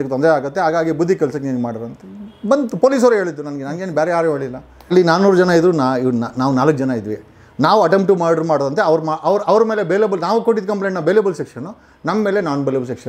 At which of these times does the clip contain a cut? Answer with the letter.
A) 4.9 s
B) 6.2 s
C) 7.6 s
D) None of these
A